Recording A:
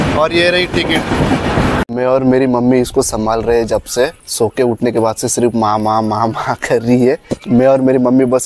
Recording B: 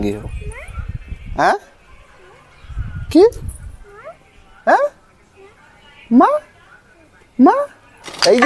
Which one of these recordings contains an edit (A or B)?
A